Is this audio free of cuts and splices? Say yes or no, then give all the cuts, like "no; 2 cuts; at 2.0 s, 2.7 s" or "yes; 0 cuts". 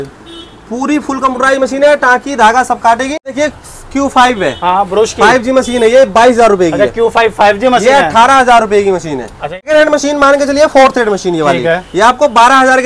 no; 2 cuts; at 3.4 s, 9.6 s